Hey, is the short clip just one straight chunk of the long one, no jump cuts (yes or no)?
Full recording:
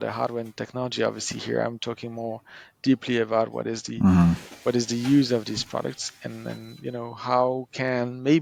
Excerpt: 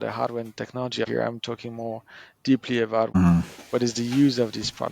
no